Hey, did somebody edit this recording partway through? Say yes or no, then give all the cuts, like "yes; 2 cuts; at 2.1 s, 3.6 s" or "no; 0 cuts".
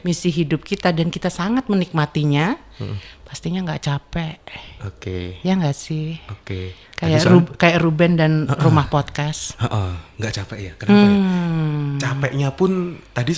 no; 0 cuts